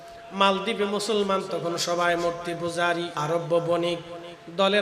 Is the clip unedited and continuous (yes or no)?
no